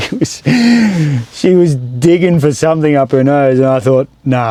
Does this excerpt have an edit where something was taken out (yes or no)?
no